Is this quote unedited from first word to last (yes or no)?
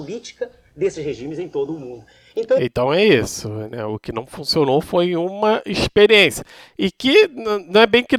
yes